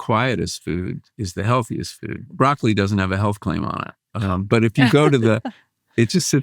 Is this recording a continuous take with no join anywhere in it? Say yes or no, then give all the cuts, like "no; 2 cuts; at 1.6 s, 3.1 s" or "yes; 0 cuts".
no; 1 cut; at 2.3 s